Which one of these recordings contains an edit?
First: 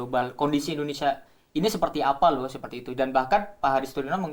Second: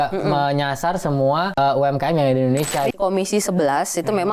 second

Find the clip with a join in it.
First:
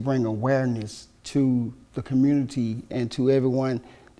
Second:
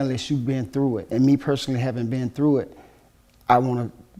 second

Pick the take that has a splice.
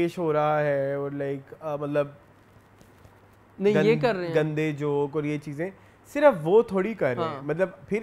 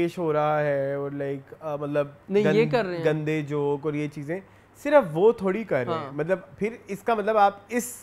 second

